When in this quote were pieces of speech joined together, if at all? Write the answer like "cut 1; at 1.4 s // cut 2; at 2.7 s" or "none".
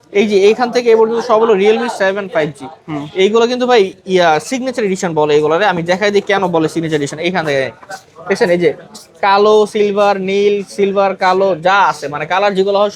none